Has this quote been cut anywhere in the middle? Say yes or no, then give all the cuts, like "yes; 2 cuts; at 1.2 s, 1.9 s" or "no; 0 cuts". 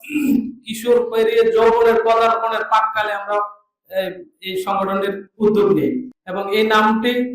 yes; 1 cut; at 6.1 s